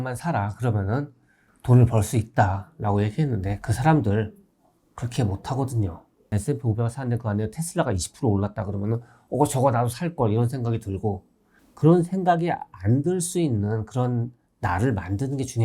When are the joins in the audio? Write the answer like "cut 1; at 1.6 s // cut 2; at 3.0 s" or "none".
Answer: cut 1; at 6.4 s